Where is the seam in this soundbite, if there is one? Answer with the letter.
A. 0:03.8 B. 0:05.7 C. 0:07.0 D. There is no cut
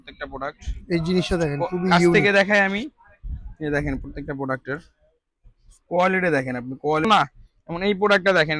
C